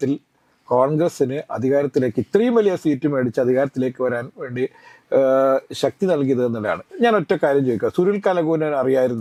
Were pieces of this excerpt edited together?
no; 0 cuts

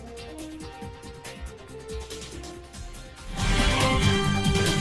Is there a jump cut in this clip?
no; 0 cuts

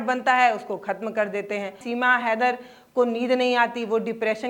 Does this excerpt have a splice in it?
yes; 1 cut; at 1.8 s

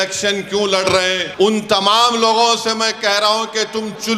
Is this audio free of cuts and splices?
no; 1 cut; at 1.2 s

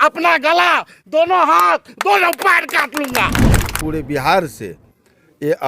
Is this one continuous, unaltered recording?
no; 1 cut; at 3.7 s

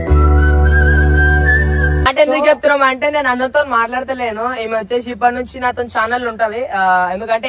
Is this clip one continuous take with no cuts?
no; 1 cut; at 2.1 s

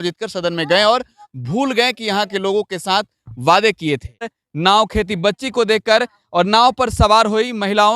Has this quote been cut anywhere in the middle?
yes; 1 cut; at 4.4 s

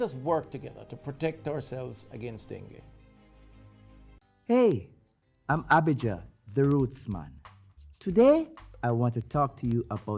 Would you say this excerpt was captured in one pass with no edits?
no; 1 cut; at 4.2 s

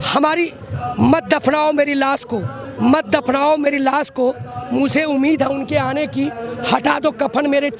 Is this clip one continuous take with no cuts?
yes; 0 cuts

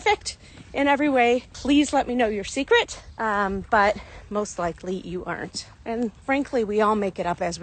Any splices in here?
no; 0 cuts

